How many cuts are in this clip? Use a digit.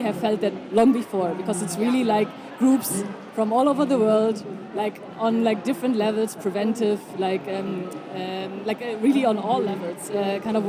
0